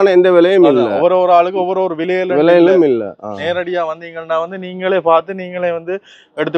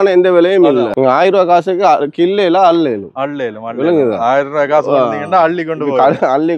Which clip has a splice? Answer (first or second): second